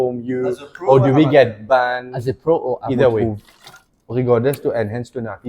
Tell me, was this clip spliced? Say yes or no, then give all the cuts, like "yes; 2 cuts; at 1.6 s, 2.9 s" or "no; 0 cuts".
yes; 1 cut; at 3.2 s